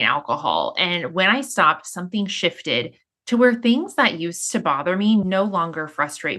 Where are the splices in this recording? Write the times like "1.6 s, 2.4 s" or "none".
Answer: 5.2 s